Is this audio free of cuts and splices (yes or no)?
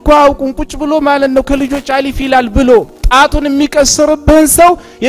yes